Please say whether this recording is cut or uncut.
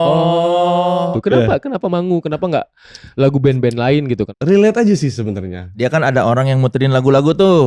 cut